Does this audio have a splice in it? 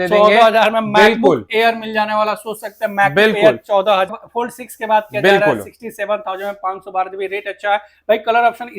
yes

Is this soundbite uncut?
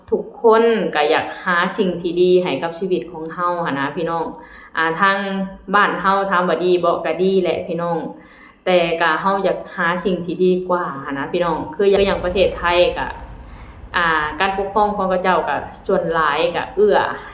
no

